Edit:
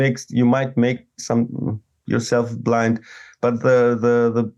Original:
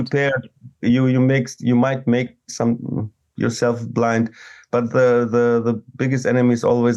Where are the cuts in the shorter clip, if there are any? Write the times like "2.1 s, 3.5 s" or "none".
none